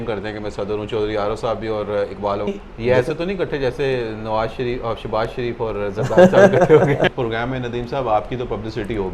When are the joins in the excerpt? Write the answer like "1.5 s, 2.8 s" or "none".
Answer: 2.5 s, 7.1 s

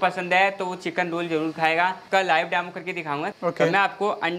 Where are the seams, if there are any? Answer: 2.0 s, 3.3 s

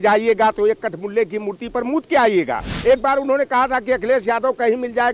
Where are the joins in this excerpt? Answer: 2.7 s

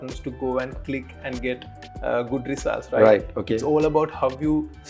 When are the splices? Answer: none

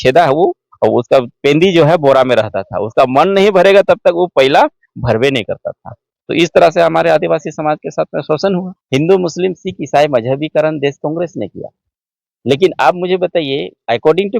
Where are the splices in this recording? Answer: 8.7 s

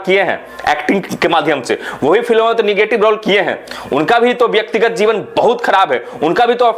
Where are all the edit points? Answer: none

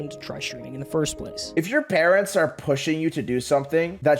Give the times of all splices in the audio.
1.5 s

